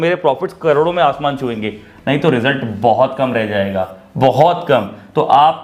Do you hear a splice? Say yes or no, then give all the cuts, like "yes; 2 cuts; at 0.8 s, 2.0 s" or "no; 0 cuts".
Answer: no; 0 cuts